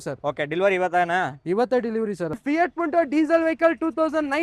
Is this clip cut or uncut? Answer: cut